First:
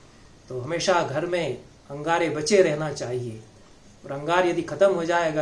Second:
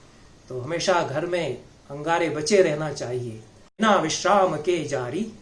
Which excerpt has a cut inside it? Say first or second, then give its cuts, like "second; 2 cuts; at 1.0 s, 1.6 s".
second; 1 cut; at 3.8 s